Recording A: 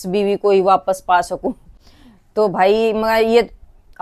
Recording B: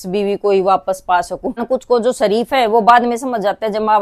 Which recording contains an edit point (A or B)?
B